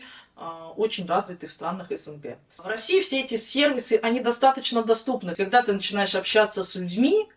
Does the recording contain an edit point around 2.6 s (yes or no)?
yes